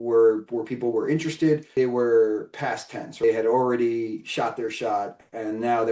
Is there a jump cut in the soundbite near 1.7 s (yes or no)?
yes